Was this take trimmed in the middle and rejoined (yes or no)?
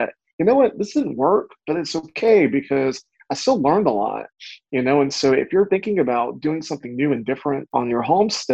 yes